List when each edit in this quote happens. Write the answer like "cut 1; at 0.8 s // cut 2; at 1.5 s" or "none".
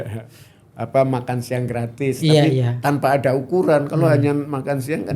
none